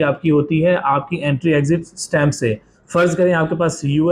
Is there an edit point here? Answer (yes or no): no